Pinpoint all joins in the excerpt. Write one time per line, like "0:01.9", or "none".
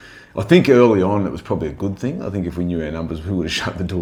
none